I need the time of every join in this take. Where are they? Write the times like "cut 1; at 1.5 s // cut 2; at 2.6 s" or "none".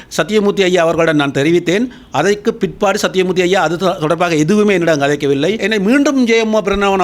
cut 1; at 5.6 s